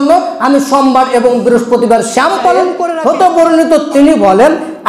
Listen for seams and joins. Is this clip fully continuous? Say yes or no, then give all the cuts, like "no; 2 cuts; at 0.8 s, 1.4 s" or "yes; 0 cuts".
no; 1 cut; at 2.8 s